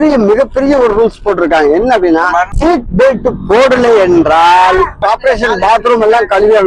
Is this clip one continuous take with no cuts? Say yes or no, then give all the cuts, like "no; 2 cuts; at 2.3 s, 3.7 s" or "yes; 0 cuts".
no; 2 cuts; at 2.5 s, 5.0 s